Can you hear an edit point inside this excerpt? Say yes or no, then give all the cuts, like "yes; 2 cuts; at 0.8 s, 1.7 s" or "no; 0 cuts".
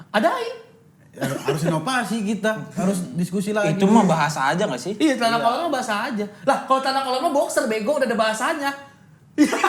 no; 0 cuts